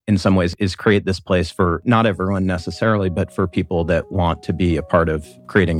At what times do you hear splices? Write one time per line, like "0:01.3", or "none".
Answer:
none

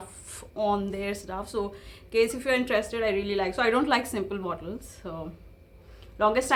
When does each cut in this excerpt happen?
none

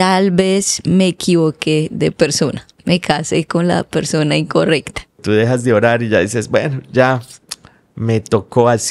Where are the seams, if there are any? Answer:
0:05.2

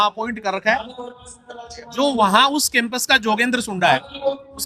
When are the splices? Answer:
none

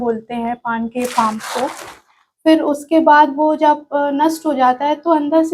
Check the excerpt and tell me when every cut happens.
none

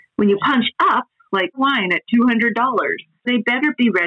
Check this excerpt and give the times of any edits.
0:01.6
0:03.3

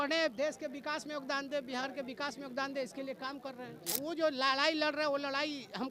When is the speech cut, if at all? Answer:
0:04.0

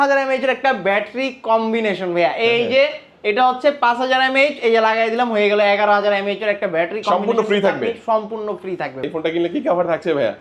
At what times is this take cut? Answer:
0:09.1

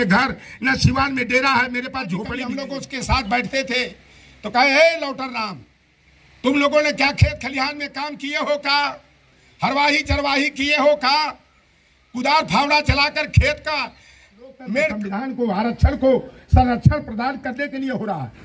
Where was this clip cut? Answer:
0:02.6
0:15.1

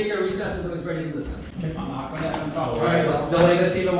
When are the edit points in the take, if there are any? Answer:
none

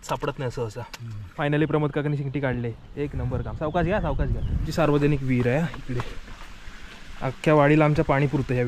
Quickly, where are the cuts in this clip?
0:01.4
0:04.7

